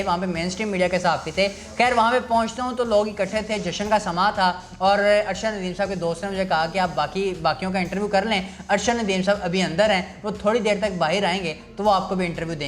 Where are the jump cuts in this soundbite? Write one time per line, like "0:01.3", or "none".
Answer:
none